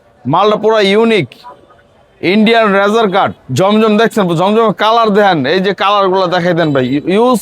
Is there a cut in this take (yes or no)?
yes